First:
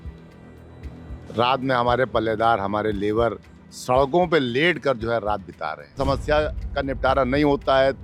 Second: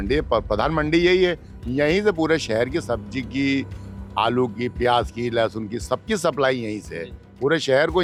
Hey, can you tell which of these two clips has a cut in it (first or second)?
first